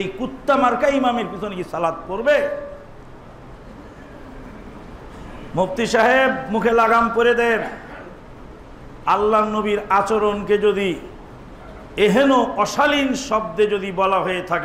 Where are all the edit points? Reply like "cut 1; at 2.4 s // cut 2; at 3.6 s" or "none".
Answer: none